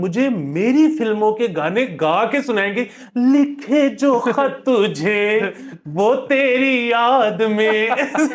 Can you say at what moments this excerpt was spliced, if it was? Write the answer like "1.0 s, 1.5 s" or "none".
none